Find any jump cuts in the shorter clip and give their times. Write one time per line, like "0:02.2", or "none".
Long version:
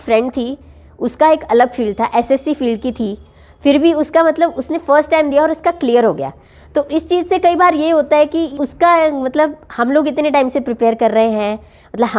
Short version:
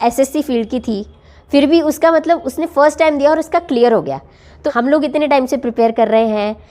0:04.5

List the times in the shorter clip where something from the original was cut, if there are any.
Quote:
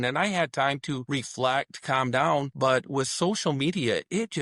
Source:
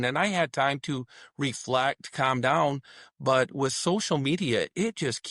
0:01.0
0:02.5

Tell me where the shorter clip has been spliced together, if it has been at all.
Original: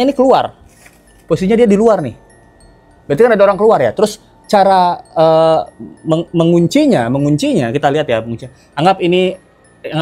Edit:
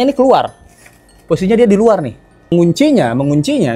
0:02.5

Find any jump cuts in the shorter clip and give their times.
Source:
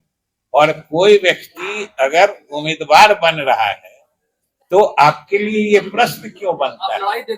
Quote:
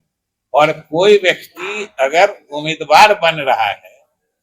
none

